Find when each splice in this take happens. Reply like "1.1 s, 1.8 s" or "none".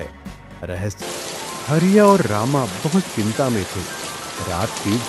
1.0 s